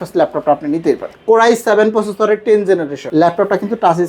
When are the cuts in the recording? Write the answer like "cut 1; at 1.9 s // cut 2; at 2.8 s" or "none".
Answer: cut 1; at 1.1 s // cut 2; at 3.0 s